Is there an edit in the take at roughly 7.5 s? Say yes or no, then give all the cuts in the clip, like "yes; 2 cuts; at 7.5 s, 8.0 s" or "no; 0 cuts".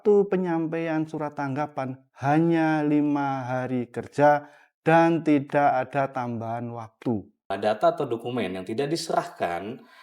yes; 1 cut; at 7.5 s